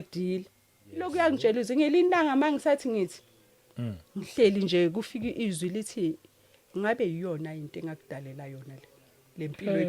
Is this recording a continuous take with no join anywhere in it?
no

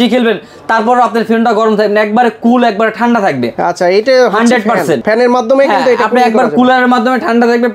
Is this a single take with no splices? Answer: yes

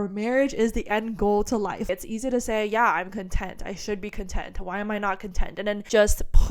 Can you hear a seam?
yes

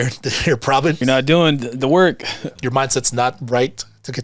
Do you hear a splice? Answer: yes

